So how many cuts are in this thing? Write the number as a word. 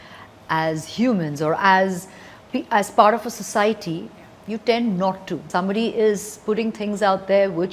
one